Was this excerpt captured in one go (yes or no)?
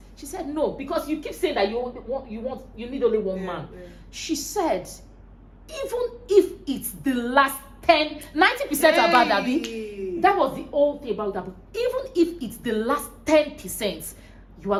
yes